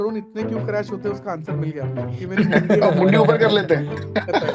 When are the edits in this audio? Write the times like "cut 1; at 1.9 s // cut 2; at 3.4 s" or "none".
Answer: cut 1; at 2.0 s